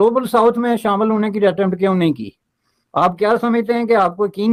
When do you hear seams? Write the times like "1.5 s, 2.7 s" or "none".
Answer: none